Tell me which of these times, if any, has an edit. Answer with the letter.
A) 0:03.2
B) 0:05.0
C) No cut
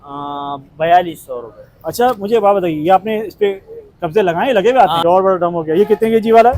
B